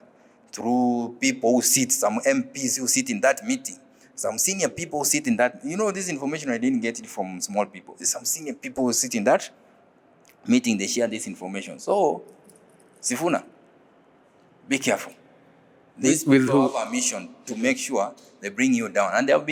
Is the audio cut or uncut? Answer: uncut